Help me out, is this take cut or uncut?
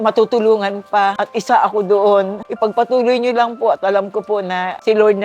uncut